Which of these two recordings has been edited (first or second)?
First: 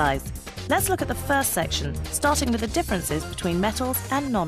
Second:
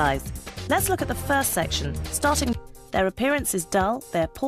first